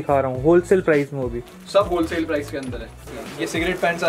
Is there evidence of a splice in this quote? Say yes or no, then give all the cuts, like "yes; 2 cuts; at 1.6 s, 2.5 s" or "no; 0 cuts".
yes; 1 cut; at 3.1 s